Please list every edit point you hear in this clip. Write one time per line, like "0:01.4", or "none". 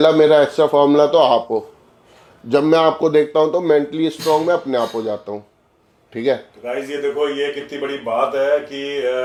none